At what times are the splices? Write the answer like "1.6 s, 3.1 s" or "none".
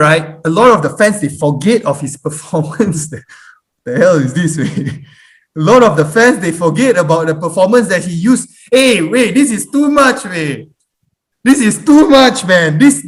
none